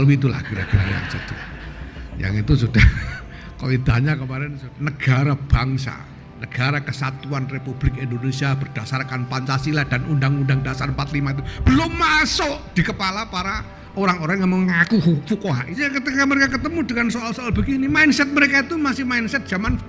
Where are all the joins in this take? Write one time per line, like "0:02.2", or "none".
0:04.3
0:15.7